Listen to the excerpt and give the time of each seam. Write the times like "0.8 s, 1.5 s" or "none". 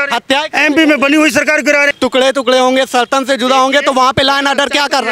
1.9 s